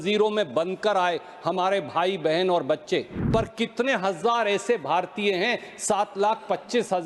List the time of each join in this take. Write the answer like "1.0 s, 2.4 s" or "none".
3.2 s